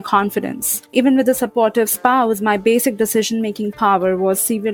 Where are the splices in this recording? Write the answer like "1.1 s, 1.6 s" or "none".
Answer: 0.9 s

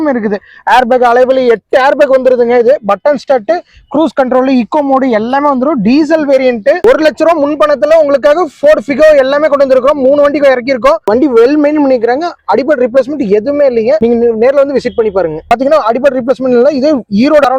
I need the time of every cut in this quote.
6.8 s, 11.0 s, 15.5 s

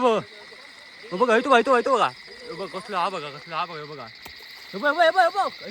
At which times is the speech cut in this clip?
none

